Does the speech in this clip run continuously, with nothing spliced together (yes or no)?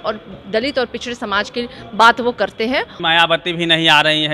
no